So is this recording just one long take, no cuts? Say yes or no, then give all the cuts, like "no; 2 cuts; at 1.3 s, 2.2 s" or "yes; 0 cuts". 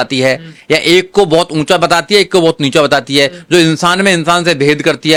yes; 0 cuts